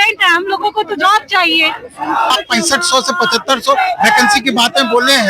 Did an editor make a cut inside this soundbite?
yes; 1 cut; at 2.3 s

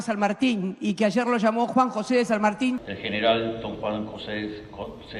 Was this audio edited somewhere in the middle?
no; 0 cuts

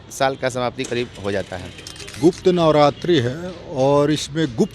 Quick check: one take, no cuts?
no; 1 cut; at 2.2 s

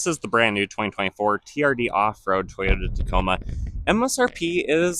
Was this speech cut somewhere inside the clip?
no; 0 cuts

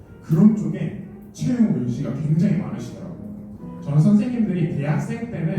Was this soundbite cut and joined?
yes; 1 cut; at 3.7 s

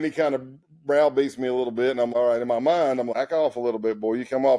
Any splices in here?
yes; 2 cuts; at 2.1 s, 3.1 s

